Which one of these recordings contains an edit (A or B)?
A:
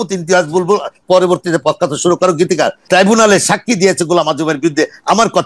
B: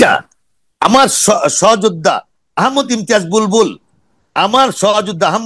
A